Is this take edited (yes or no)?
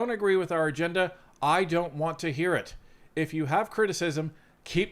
no